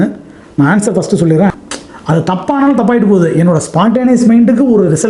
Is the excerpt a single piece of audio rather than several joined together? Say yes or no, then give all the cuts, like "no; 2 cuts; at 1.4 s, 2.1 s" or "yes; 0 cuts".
no; 1 cut; at 1.5 s